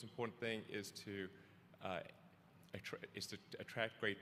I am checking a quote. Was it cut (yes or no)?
no